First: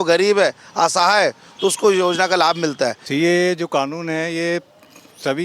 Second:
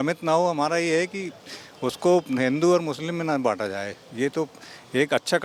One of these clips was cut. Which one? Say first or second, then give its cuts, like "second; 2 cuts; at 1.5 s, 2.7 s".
first; 1 cut; at 3.0 s